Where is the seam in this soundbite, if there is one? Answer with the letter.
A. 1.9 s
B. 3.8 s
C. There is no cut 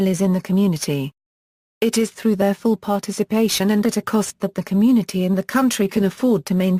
A